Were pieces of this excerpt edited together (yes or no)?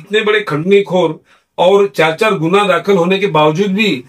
no